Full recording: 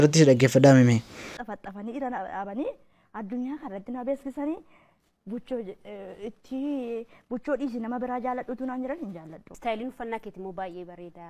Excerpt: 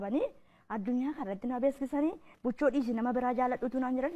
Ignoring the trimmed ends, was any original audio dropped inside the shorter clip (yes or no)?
yes